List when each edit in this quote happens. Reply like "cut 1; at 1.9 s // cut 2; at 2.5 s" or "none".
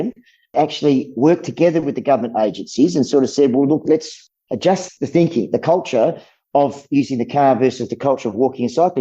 cut 1; at 4.9 s